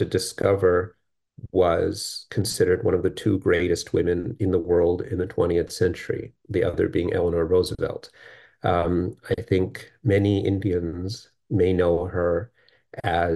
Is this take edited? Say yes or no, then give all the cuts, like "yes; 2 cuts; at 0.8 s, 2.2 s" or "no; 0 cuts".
no; 0 cuts